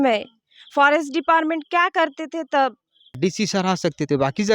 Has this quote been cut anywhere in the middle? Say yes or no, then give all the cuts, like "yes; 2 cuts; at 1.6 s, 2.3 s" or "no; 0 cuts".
yes; 1 cut; at 3.2 s